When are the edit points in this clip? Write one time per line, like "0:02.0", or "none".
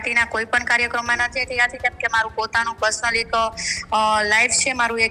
none